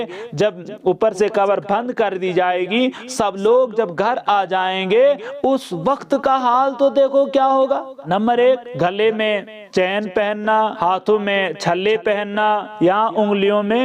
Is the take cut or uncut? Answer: cut